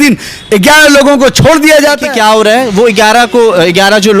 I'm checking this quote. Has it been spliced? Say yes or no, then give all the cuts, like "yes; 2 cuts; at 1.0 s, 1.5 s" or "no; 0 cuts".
yes; 1 cut; at 2.0 s